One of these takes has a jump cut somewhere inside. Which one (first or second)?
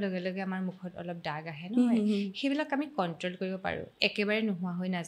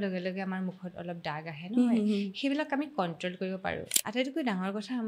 second